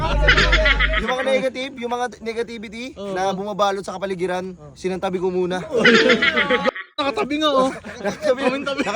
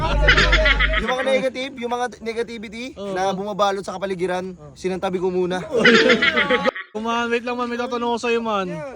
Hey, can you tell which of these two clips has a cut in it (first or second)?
second